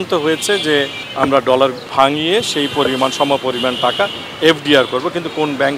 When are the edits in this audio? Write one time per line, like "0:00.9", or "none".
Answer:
0:01.0
0:01.8

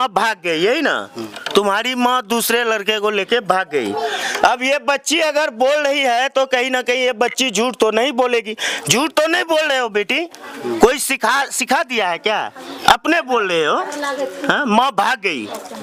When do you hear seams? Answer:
none

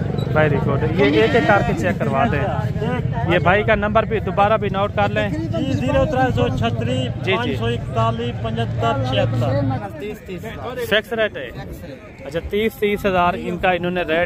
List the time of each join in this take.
0:09.8

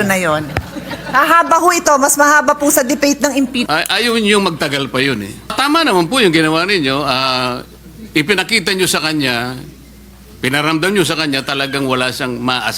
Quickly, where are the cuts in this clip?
0:03.7
0:05.5

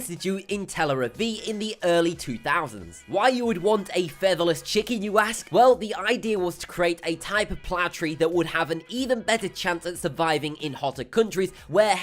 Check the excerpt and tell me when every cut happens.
0:01.9

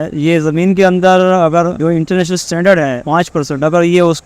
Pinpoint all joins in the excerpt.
0:01.8
0:03.0

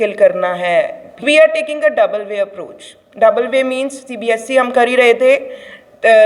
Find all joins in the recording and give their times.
0:01.2

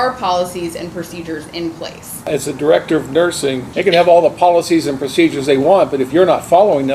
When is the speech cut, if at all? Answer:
0:02.3
0:03.6

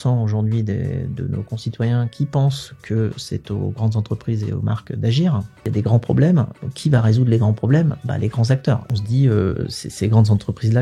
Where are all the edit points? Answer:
0:05.7
0:08.9

